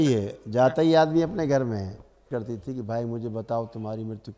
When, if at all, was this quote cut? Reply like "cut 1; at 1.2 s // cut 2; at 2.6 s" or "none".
cut 1; at 2.3 s